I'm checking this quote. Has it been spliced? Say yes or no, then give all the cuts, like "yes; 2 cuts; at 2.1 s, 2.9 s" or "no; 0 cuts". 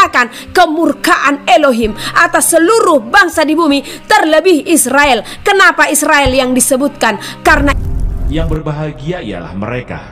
yes; 1 cut; at 7.8 s